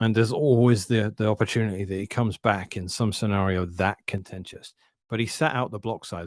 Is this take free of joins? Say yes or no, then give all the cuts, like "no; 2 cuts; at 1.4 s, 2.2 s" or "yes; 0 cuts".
yes; 0 cuts